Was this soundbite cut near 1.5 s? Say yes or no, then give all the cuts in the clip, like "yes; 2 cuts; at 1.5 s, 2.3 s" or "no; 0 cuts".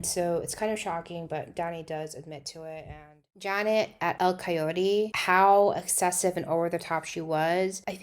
no; 1 cut; at 3.2 s